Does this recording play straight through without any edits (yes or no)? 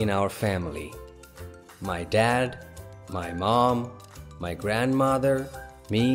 yes